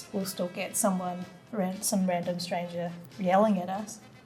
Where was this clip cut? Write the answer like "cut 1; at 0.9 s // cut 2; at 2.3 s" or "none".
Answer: cut 1; at 3.1 s